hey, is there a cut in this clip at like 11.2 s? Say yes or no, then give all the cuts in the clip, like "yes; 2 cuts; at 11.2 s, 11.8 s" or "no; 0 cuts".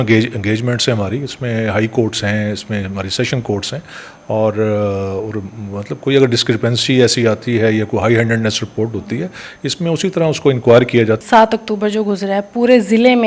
yes; 1 cut; at 11.2 s